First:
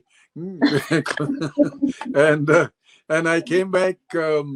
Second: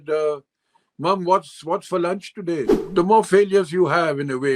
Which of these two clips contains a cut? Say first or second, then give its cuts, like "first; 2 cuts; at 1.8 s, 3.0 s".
second; 1 cut; at 2.8 s